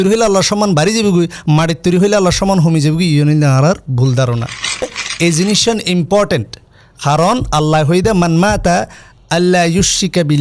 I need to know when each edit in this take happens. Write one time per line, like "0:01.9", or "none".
0:04.9